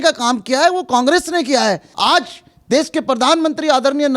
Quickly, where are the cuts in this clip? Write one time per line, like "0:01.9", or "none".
0:01.9